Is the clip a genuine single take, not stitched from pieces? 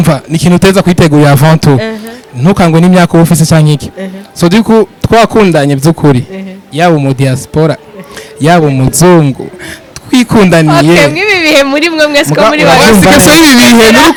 yes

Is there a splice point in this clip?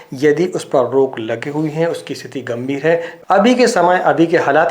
yes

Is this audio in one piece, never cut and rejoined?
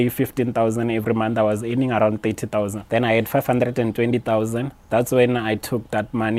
no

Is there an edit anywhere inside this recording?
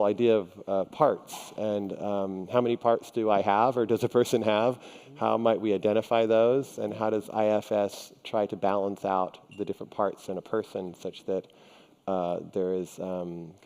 yes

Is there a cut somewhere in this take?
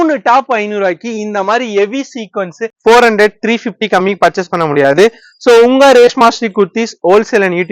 yes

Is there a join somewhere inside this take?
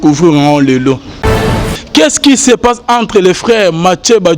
yes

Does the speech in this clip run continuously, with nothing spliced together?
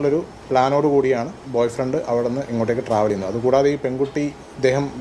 yes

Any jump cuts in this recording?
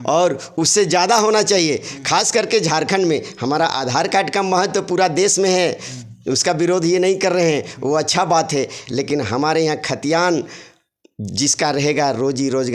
no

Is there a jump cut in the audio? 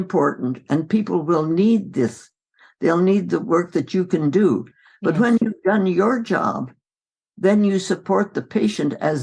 no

